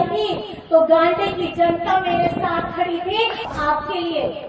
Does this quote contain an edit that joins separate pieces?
yes; 1 cut; at 3.4 s

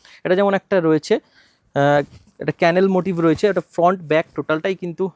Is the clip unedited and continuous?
yes; 0 cuts

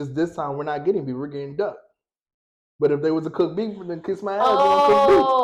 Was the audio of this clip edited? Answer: no; 0 cuts

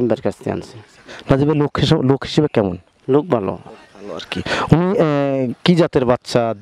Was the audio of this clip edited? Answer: no; 0 cuts

